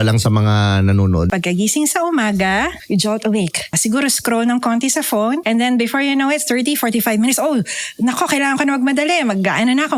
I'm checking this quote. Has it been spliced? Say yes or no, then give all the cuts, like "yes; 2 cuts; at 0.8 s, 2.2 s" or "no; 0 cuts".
yes; 4 cuts; at 1.3 s, 2.8 s, 3.8 s, 5.4 s